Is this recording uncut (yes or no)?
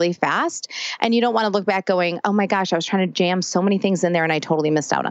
yes